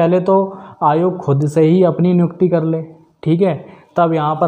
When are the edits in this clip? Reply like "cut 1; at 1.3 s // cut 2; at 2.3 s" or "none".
none

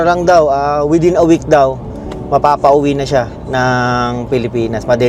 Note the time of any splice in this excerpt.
none

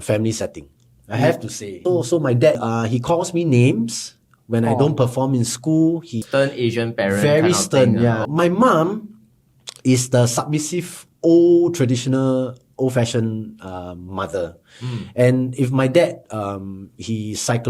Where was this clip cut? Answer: cut 1; at 1.7 s // cut 2; at 2.6 s // cut 3; at 6.2 s // cut 4; at 8.2 s

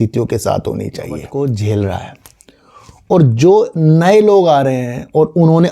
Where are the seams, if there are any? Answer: cut 1; at 1.3 s

